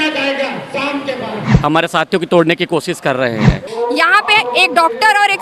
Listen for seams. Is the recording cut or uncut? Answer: cut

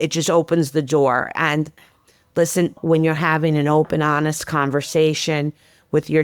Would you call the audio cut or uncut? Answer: cut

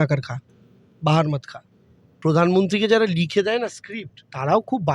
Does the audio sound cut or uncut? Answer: cut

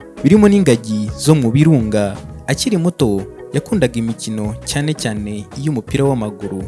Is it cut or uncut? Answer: cut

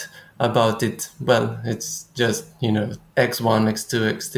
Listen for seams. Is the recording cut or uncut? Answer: uncut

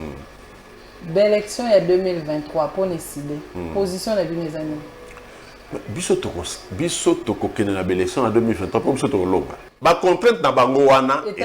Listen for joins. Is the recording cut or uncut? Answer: cut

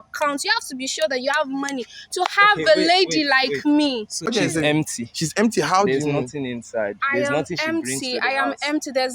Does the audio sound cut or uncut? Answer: cut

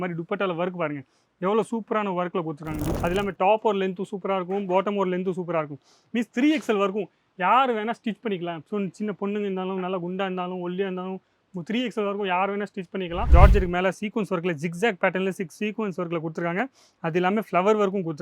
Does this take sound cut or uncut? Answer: cut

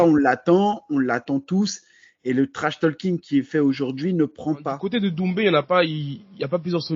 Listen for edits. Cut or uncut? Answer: cut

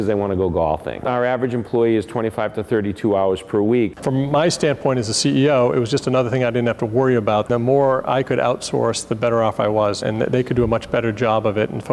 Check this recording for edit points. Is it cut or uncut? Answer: cut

